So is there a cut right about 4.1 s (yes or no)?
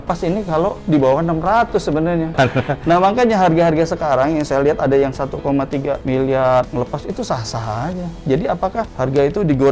no